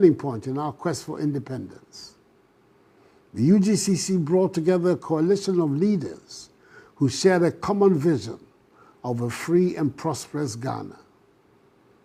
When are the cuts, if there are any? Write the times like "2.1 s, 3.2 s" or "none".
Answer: none